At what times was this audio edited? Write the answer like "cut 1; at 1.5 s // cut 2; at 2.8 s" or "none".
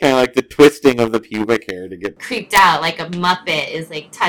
cut 1; at 2.2 s